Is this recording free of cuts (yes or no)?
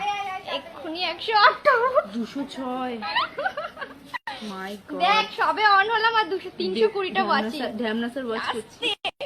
no